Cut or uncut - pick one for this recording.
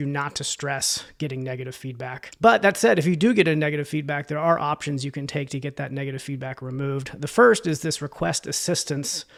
uncut